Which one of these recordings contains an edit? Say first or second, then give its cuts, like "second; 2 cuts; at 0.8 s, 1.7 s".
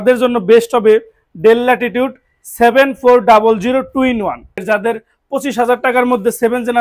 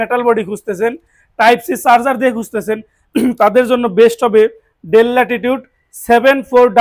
first; 1 cut; at 4.6 s